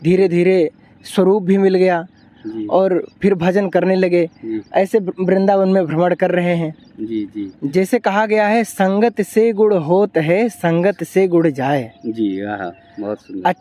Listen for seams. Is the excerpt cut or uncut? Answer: cut